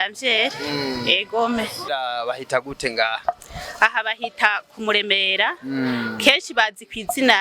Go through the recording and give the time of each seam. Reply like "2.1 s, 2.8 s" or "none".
1.9 s

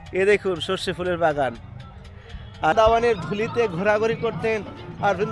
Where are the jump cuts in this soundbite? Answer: 2.7 s

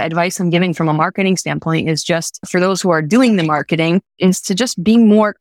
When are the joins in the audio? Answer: none

